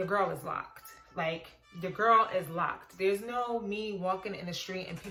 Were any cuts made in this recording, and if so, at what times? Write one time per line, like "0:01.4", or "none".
none